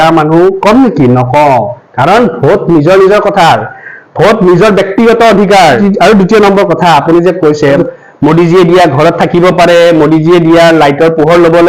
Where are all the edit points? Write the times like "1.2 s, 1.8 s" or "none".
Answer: none